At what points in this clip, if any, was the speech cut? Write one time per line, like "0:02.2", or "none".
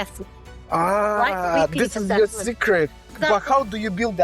0:03.1

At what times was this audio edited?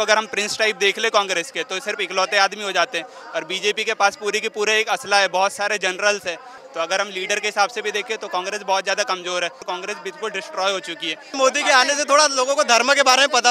0:06.5
0:09.6
0:11.4

